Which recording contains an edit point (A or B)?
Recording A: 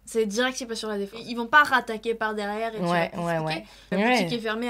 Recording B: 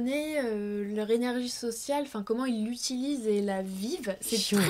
A